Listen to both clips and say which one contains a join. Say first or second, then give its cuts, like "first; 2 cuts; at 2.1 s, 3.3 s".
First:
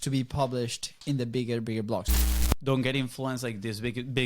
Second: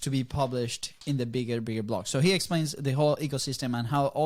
first; 1 cut; at 2.1 s